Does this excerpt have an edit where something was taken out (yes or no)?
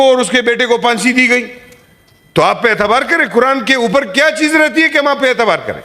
no